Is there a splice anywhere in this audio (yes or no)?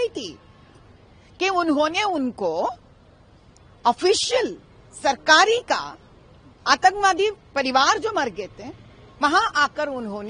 no